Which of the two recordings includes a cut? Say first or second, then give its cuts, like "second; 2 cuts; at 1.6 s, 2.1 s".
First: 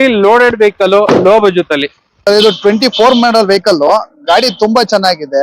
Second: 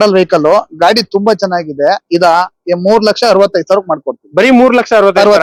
first; 1 cut; at 2.3 s